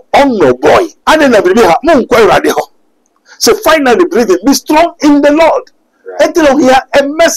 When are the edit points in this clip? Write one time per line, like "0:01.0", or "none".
0:00.9